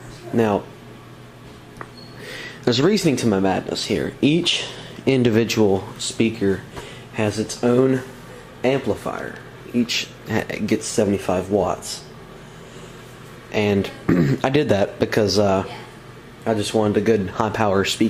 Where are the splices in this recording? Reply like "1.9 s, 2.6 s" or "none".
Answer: 6.2 s